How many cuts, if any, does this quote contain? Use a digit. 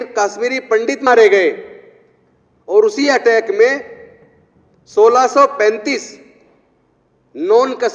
1